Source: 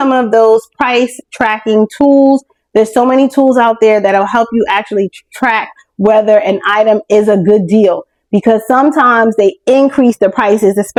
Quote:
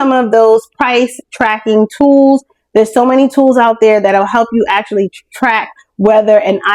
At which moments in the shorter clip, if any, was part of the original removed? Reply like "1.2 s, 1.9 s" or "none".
none